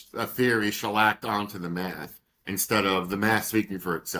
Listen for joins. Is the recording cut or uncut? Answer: uncut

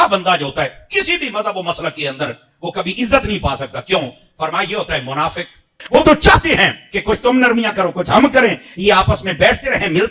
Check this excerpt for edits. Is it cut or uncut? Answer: cut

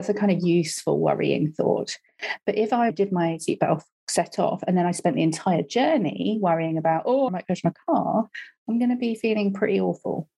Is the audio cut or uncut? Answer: cut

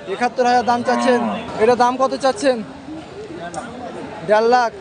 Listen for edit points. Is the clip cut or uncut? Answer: cut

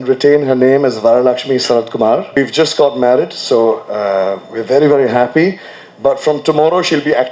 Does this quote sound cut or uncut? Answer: cut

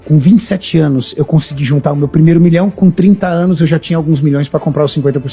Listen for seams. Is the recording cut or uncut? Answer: uncut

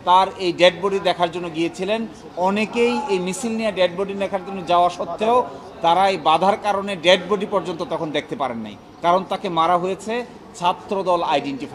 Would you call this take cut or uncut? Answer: uncut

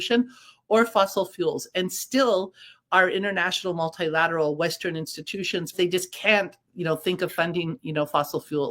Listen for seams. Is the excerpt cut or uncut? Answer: cut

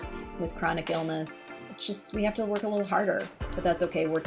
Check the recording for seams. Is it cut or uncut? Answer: uncut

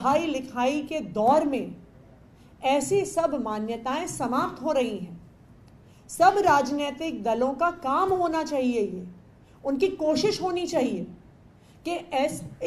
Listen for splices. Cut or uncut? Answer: uncut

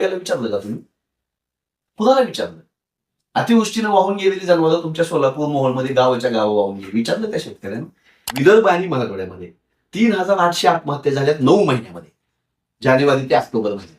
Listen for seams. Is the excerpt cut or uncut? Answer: cut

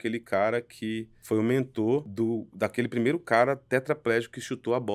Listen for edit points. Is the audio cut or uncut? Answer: cut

